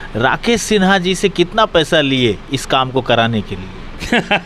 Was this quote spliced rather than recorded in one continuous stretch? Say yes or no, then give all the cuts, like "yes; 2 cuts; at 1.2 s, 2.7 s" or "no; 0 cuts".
no; 0 cuts